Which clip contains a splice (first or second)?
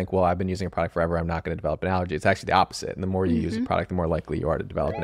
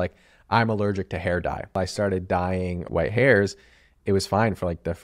second